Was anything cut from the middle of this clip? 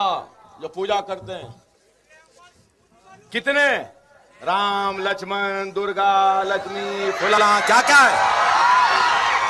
no; 0 cuts

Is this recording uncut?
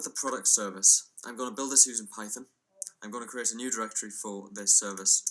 no; 1 cut; at 3.7 s

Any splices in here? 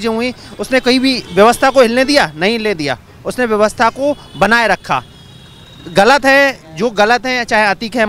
no; 0 cuts

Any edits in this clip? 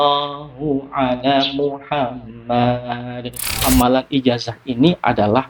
yes; 1 cut; at 3.5 s

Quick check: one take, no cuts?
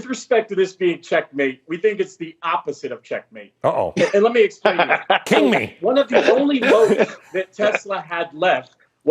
no; 1 cut; at 7.2 s

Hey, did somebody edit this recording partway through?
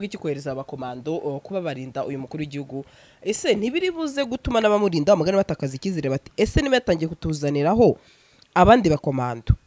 no; 0 cuts

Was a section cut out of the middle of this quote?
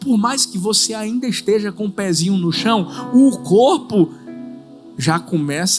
no; 0 cuts

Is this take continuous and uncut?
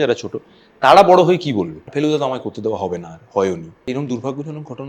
no; 2 cuts; at 1.8 s, 3.7 s

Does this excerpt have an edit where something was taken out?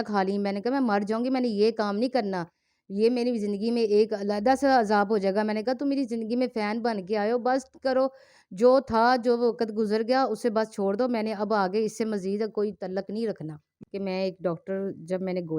no; 0 cuts

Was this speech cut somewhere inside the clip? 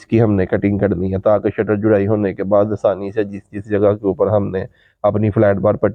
no; 0 cuts

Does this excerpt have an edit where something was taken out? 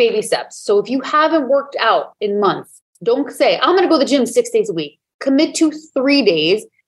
no; 0 cuts

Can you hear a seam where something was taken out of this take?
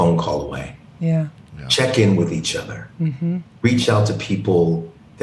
no; 0 cuts

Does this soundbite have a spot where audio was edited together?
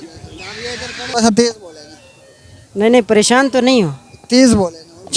yes; 1 cut; at 1.0 s

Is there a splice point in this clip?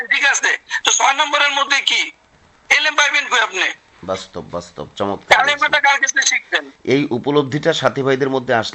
no; 0 cuts

